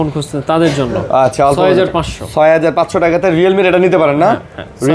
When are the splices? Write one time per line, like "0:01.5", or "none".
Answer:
none